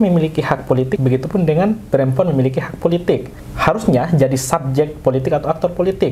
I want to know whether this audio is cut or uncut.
cut